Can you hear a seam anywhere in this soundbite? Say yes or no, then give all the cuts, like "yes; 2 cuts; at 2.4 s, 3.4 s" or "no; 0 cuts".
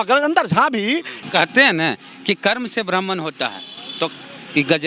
yes; 1 cut; at 1.2 s